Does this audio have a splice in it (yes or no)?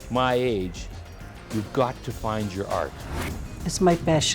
yes